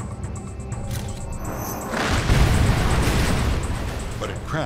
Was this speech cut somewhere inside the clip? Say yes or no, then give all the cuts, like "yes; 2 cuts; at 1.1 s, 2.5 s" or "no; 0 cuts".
no; 0 cuts